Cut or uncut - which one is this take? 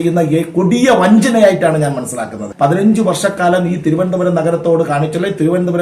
cut